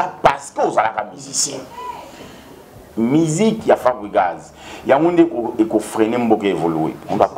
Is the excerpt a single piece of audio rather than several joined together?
no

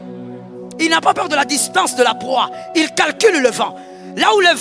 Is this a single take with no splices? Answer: yes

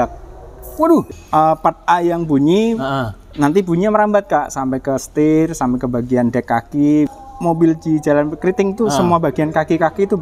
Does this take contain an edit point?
yes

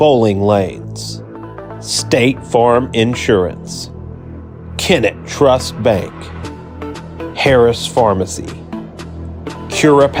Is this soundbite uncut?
yes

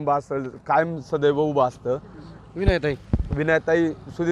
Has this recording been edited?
no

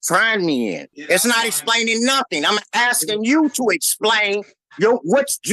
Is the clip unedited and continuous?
no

